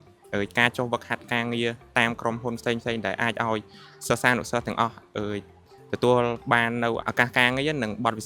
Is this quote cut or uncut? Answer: cut